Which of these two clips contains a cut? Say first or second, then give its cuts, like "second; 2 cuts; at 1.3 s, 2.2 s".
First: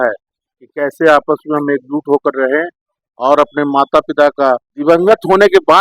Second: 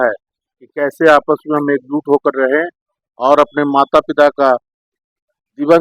first; 1 cut; at 4.7 s